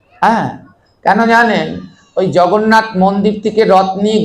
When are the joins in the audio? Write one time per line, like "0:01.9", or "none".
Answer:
none

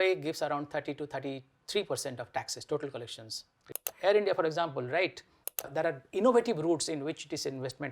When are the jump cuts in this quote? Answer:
0:03.8
0:05.6

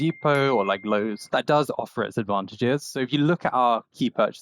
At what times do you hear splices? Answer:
0:01.2
0:02.9

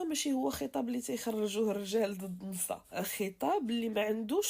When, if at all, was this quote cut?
0:02.9

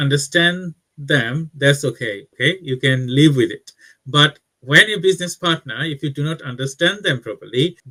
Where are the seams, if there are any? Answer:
none

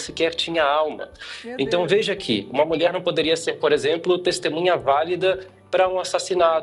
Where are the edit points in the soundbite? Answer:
none

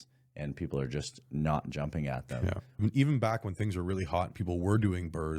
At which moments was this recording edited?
0:02.8

